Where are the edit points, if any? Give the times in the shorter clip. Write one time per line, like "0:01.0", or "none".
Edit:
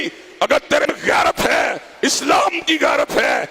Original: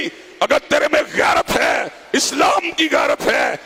0:00.9